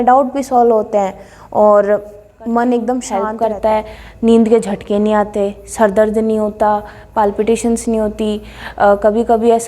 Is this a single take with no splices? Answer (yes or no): no